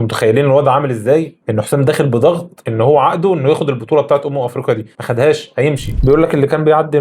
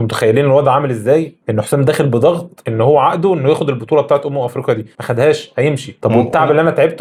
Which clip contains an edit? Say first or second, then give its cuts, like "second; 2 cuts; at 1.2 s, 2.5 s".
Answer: first; 1 cut; at 5.9 s